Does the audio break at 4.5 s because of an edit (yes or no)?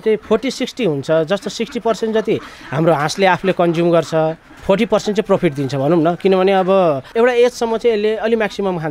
no